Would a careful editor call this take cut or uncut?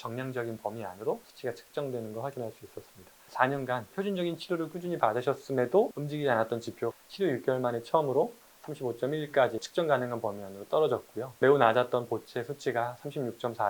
cut